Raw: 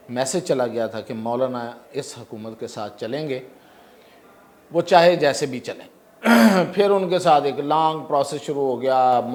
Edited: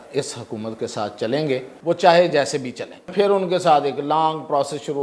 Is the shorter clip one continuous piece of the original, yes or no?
no